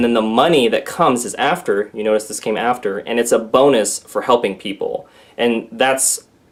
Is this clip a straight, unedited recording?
yes; 0 cuts

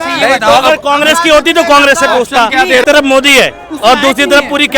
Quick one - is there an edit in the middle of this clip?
yes; 1 cut; at 2.8 s

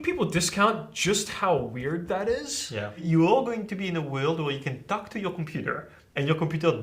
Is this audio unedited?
no; 1 cut; at 3.0 s

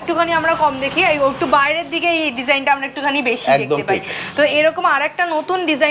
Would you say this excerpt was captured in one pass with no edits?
yes; 0 cuts

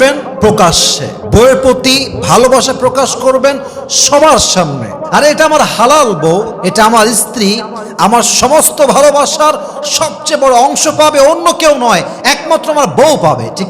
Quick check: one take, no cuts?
yes; 0 cuts

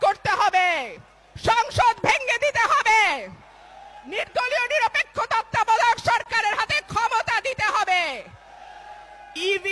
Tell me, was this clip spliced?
no; 0 cuts

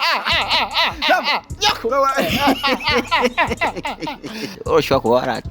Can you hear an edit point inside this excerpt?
yes; 1 cut; at 4.5 s

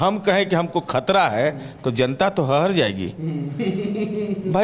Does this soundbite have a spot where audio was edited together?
no; 0 cuts

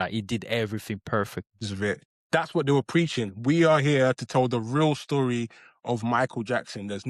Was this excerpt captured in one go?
no; 1 cut; at 1.6 s

